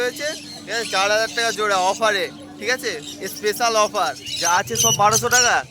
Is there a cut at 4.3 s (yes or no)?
yes